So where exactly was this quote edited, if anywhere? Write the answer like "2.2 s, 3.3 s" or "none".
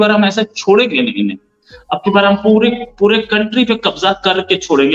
none